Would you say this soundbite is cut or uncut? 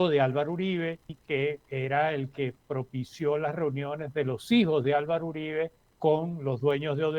cut